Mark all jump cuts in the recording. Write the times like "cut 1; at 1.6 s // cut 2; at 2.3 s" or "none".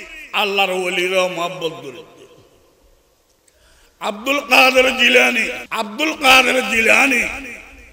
cut 1; at 5.6 s